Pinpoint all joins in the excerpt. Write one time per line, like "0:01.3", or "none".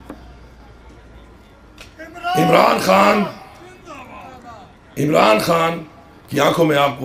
none

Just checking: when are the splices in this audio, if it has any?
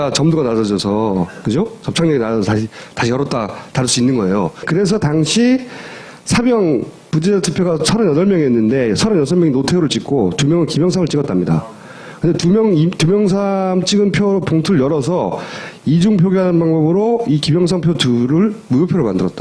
0:02.9

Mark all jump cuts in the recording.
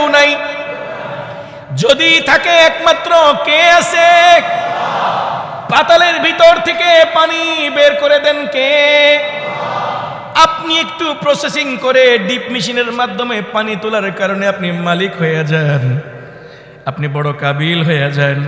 none

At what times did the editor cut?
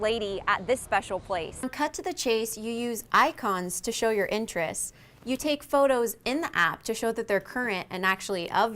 0:01.7

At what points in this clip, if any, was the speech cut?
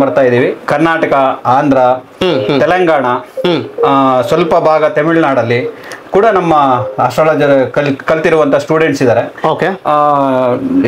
none

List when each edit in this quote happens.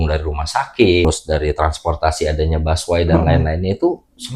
0:01.1

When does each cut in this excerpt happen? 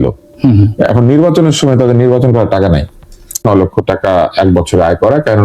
0:03.4

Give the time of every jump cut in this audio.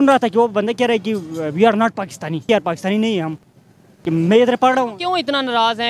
0:02.5

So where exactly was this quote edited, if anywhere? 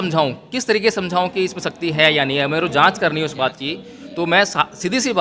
none

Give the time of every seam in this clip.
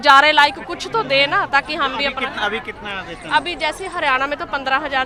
none

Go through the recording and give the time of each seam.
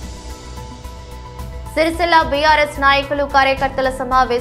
0:00.9
0:01.8

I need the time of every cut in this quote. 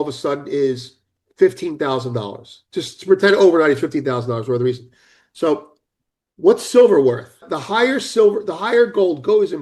0:07.5

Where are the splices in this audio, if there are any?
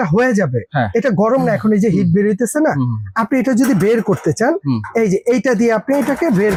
none

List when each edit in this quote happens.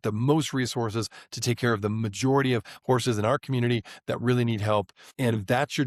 none

